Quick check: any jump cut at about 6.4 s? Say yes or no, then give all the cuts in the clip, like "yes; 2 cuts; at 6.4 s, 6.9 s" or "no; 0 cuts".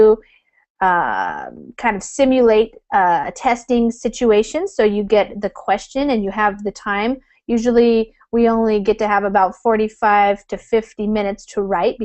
no; 0 cuts